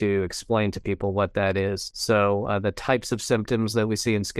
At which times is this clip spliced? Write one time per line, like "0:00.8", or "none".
0:01.9

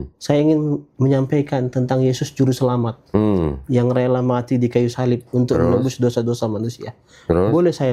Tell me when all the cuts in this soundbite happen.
none

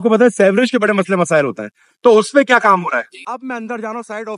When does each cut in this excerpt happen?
0:03.2

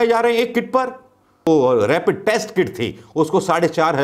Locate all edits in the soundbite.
0:01.5

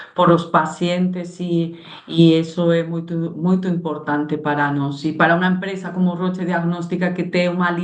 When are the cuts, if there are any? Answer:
none

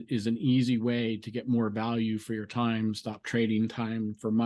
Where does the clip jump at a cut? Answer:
none

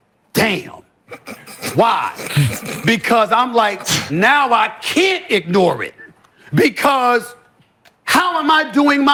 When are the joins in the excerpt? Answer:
none

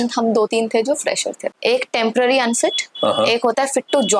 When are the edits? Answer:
0:01.6

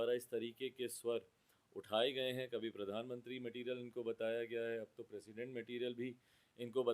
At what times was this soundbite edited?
none

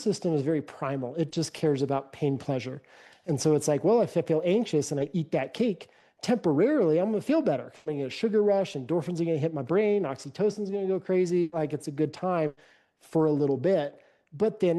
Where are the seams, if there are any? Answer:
none

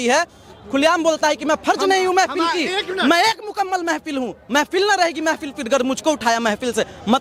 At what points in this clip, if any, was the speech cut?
none

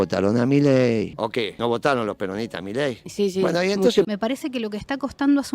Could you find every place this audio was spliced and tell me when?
0:01.1
0:04.1

